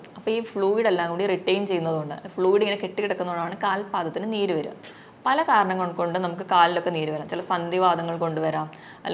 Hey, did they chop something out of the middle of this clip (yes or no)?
no